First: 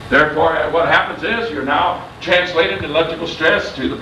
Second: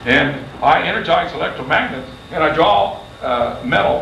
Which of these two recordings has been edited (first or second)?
second